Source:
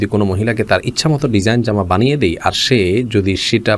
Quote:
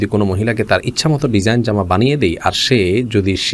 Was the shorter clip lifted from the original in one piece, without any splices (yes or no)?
yes